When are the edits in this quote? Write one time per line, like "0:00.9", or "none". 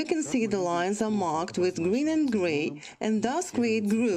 0:01.0